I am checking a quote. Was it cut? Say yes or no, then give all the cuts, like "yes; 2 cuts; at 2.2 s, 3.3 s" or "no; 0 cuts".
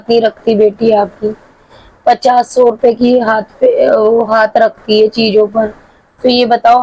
no; 0 cuts